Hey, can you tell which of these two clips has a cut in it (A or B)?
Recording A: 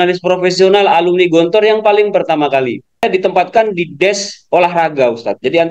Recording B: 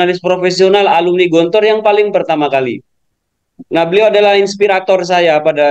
A